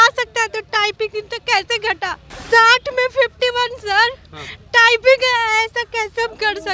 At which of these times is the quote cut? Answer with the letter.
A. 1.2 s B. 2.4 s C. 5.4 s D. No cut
B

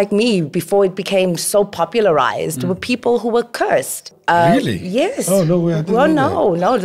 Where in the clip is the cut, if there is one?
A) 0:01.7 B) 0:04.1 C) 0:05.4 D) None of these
B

